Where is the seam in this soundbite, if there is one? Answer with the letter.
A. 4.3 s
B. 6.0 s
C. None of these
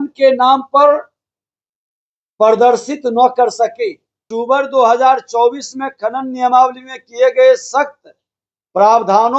A